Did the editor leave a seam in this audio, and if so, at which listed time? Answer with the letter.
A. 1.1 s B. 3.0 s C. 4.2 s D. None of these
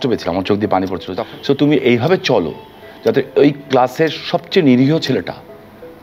A